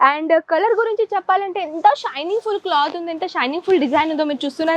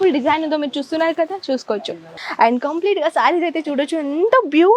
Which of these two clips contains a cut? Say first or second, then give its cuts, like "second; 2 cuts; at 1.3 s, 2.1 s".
second; 1 cut; at 2.2 s